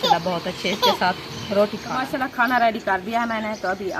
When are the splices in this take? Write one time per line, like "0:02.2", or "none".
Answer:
0:02.0